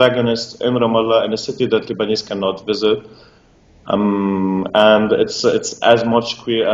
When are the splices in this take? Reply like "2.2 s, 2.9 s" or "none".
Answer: 1.6 s